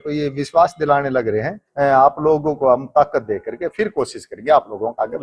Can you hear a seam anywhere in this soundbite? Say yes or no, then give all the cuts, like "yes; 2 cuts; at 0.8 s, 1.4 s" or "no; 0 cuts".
yes; 1 cut; at 1.6 s